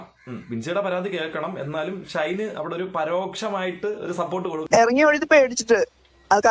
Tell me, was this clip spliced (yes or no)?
yes